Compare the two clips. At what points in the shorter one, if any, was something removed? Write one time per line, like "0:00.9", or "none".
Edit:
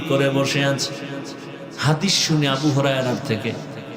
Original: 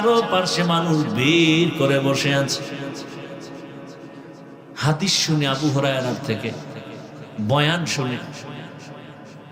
0:01.7